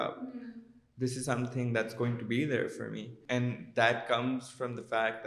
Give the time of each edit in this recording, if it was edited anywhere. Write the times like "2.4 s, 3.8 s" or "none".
3.1 s